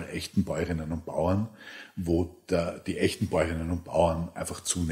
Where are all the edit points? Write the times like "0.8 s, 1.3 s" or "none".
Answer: none